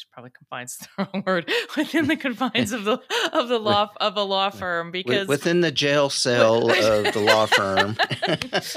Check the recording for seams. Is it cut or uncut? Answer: uncut